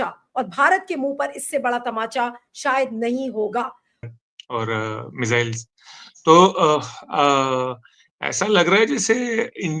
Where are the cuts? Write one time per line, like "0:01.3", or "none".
0:04.0